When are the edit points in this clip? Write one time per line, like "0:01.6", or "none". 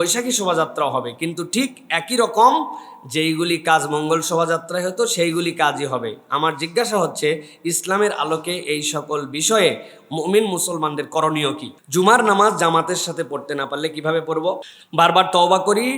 0:11.7
0:14.7